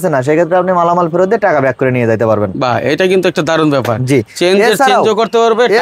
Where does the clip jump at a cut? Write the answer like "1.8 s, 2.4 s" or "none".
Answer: none